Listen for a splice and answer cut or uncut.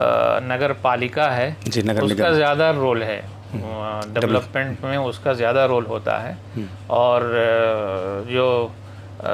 uncut